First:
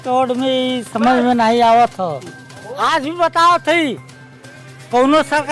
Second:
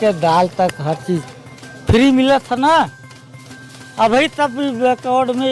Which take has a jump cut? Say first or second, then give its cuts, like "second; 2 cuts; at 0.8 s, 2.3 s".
first; 1 cut; at 2.7 s